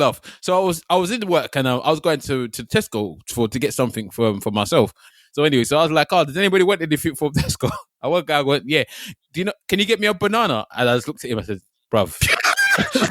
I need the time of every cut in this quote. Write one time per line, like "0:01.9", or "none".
0:05.0